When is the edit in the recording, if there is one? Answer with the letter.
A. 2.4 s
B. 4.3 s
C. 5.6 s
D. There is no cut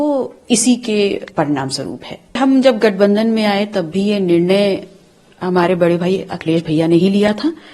A